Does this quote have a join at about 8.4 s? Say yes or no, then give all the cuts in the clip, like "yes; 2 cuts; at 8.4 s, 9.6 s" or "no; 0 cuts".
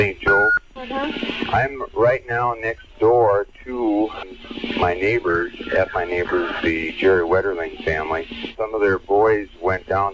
yes; 1 cut; at 8.4 s